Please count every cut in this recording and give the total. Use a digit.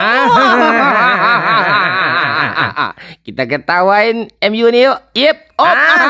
1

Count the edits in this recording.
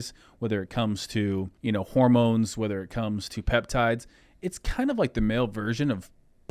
1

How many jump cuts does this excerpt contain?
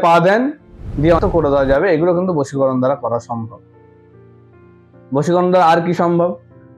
1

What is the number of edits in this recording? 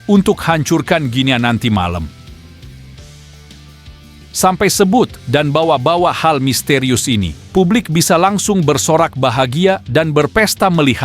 2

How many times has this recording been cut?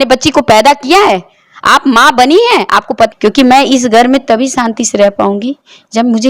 1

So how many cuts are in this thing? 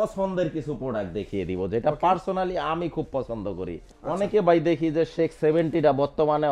1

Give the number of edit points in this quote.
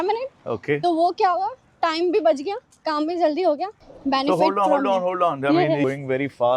2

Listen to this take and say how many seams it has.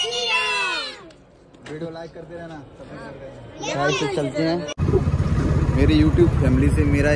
1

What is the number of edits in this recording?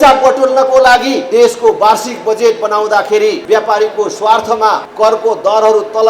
3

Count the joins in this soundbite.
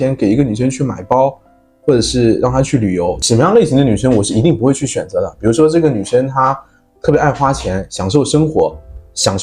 1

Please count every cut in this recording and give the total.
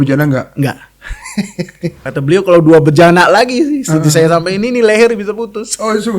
1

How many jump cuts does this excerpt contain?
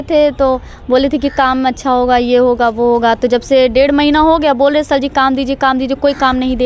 0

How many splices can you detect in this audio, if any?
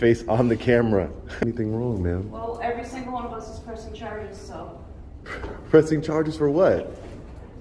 1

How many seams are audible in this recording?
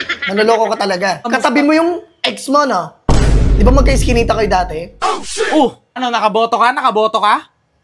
2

